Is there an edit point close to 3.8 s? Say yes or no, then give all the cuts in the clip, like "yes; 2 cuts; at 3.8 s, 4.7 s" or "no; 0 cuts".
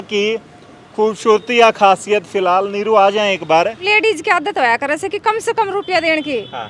yes; 1 cut; at 3.8 s